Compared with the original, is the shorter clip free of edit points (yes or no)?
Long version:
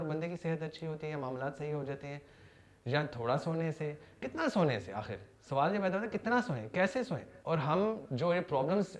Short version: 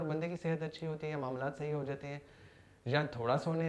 yes